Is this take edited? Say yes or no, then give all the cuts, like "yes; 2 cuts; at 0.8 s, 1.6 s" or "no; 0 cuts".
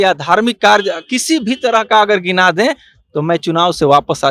no; 0 cuts